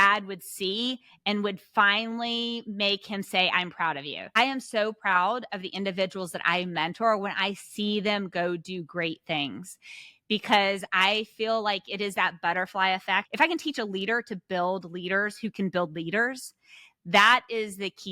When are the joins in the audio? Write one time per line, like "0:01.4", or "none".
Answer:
0:04.3
0:13.3